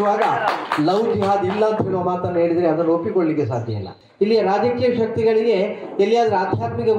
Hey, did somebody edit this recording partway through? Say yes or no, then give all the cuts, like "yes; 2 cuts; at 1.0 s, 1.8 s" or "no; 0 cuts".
yes; 1 cut; at 4.0 s